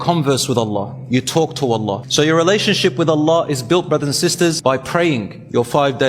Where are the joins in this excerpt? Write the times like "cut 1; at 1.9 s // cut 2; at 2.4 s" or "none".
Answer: cut 1; at 2.0 s // cut 2; at 4.6 s